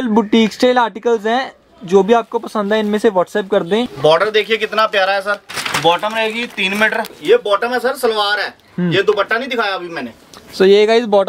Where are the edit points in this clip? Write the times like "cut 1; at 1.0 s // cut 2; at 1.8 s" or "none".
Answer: cut 1; at 3.9 s // cut 2; at 5.5 s // cut 3; at 7.1 s